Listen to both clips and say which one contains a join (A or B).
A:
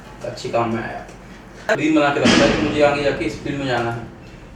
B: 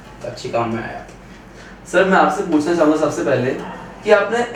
A